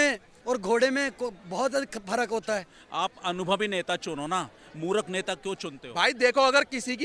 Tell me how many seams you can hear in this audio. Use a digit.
2